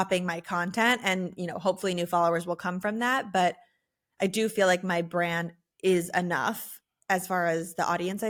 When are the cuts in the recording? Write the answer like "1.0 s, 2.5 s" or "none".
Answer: none